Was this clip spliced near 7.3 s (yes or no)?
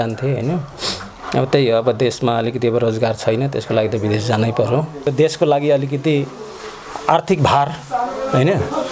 no